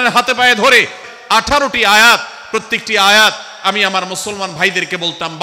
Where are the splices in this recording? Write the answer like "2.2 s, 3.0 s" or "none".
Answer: 1.1 s